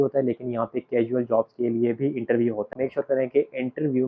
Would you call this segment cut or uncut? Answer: cut